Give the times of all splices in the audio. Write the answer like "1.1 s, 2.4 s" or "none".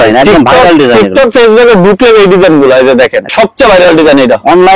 3.2 s